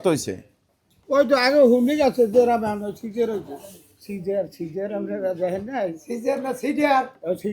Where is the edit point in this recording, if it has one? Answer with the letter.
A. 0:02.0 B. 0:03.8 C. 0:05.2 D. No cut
B